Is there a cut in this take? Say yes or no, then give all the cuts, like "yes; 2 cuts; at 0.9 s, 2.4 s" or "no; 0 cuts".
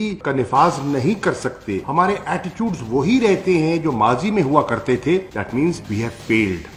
no; 0 cuts